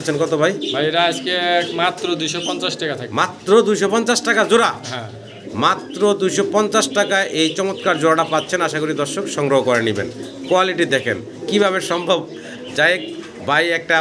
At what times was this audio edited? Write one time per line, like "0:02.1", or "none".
none